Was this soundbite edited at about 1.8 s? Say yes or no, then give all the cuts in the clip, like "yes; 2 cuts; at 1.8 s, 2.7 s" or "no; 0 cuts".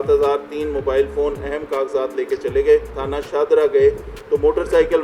no; 1 cut; at 3.0 s